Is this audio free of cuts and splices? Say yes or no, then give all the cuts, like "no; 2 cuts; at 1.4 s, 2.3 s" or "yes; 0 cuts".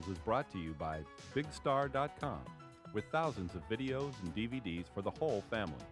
yes; 0 cuts